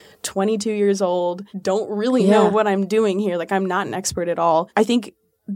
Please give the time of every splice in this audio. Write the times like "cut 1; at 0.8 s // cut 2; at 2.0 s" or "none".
cut 1; at 1.5 s // cut 2; at 4.7 s